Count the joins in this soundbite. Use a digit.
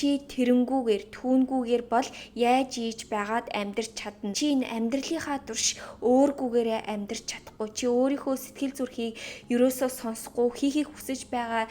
1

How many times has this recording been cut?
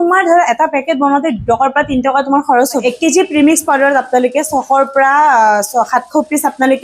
1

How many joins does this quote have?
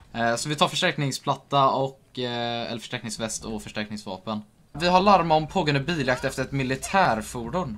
1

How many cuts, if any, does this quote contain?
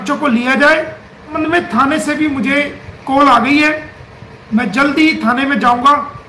1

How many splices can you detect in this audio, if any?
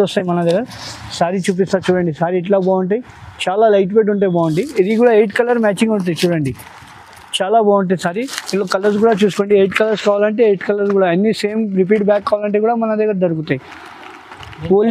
0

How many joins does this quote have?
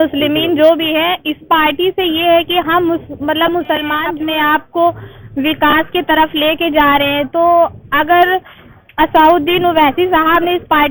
1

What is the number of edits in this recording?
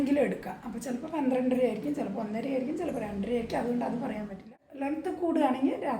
1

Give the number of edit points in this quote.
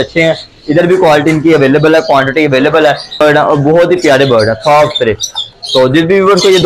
1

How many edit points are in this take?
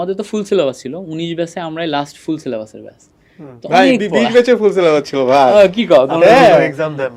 0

